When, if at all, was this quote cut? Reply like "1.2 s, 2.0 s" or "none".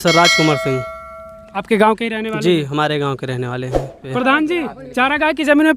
4.0 s

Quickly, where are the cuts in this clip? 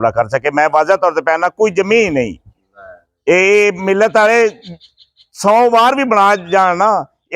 none

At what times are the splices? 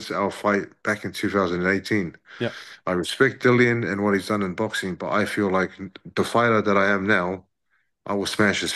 none

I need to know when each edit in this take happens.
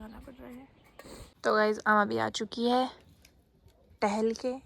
1.3 s

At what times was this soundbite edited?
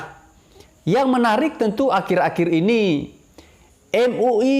none

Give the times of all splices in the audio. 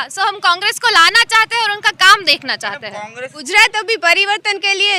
3.4 s

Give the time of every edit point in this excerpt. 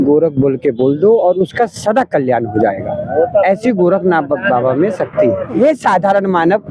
5.6 s

